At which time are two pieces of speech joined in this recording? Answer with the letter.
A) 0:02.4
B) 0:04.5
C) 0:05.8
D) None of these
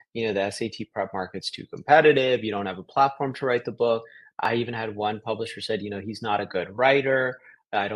B